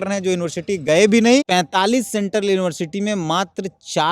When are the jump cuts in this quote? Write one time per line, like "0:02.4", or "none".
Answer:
0:01.5